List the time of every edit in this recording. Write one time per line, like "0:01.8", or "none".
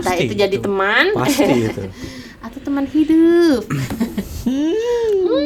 none